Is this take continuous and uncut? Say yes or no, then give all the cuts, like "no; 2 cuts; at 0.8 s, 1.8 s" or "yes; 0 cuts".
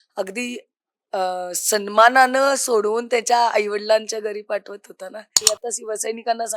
no; 1 cut; at 5.4 s